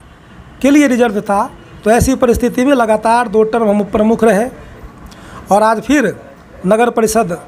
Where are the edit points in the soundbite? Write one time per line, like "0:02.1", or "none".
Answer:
none

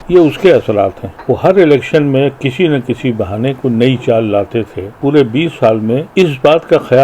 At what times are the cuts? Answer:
0:01.1
0:04.9
0:06.1

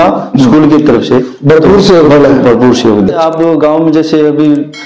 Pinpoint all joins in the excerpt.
0:03.1

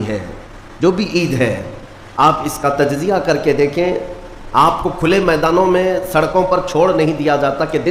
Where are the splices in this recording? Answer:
none

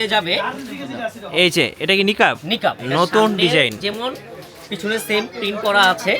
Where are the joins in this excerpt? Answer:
0:02.8

